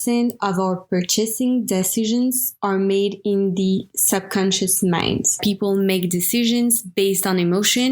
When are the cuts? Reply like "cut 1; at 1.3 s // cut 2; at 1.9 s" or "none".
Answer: cut 1; at 5.4 s